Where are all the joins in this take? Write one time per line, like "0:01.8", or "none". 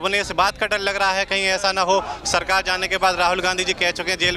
none